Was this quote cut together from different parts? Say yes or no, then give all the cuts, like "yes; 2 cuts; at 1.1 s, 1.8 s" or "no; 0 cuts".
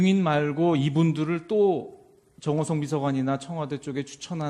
yes; 1 cut; at 3.2 s